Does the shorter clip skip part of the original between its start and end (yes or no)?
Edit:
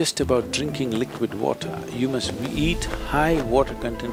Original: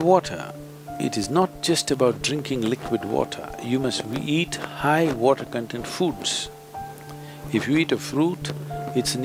no